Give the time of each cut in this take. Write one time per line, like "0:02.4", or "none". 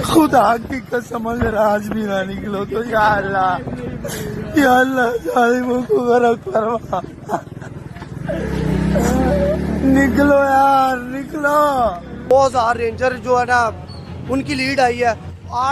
0:12.3